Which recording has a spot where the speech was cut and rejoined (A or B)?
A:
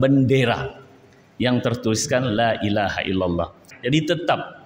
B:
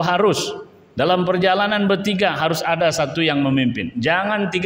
A